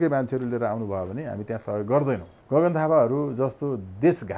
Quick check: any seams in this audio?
yes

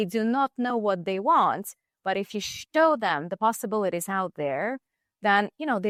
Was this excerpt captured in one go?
yes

